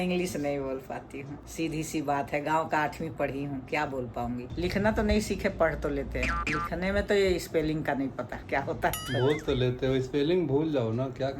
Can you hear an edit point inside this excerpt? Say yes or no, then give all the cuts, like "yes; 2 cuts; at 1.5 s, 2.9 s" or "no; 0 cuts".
yes; 1 cut; at 4.5 s